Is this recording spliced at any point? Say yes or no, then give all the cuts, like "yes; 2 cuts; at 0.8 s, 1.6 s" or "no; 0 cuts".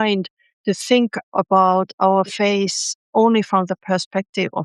no; 0 cuts